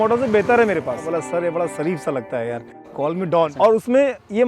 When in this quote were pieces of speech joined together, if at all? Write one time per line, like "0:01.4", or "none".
0:01.1
0:03.5